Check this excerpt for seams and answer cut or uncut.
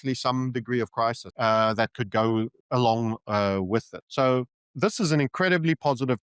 cut